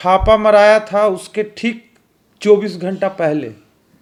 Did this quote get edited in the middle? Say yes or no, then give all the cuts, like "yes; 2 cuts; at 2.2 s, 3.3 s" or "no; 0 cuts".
no; 0 cuts